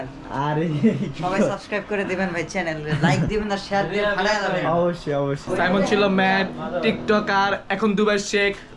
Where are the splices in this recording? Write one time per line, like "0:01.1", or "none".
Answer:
0:05.4